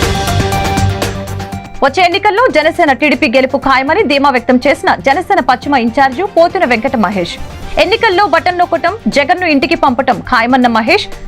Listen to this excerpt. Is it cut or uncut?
uncut